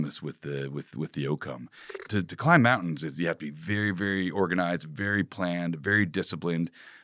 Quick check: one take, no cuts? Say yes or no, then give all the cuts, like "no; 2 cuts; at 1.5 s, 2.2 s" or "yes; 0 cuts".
no; 1 cut; at 1.9 s